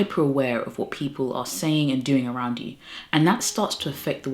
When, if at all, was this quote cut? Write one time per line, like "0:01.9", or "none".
none